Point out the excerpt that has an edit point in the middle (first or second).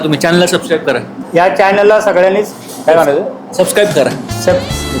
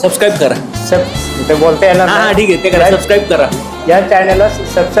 first